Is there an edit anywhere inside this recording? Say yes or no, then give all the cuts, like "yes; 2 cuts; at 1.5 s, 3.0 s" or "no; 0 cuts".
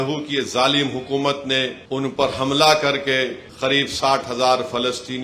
yes; 2 cuts; at 1.8 s, 3.4 s